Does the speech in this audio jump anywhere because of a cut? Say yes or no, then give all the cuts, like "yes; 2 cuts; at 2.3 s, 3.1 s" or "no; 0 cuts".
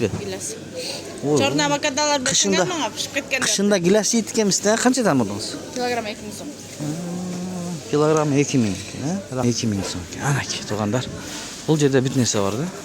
yes; 1 cut; at 9.4 s